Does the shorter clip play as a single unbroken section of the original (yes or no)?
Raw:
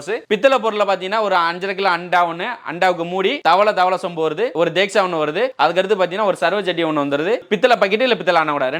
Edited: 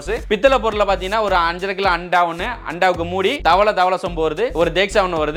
yes